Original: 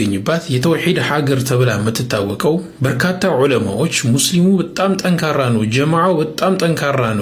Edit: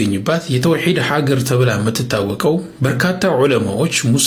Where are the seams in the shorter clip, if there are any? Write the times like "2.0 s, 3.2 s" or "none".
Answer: none